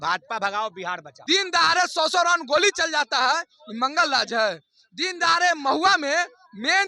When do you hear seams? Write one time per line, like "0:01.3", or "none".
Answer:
0:01.1

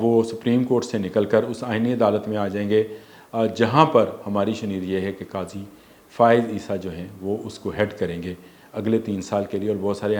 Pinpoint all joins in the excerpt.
none

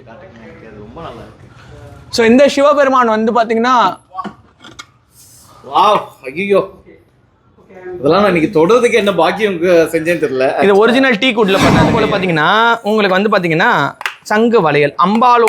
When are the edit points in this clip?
0:11.9

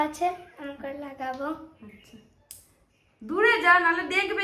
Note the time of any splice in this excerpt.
none

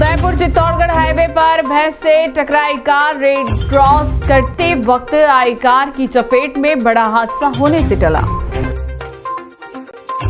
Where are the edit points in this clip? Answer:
none

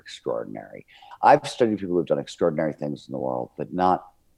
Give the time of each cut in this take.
0:01.0

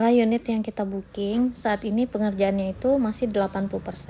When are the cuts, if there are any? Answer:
none

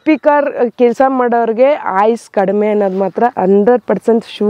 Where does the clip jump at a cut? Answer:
none

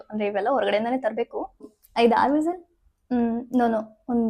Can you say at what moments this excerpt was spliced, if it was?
0:01.8

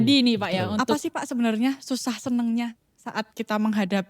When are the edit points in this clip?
0:01.1

